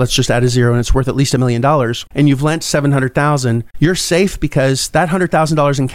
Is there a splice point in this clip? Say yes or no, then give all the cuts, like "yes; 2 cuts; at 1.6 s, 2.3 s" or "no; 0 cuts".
yes; 2 cuts; at 2.0 s, 3.7 s